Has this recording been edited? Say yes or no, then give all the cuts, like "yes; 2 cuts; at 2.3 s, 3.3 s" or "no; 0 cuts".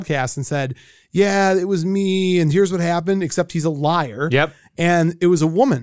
no; 0 cuts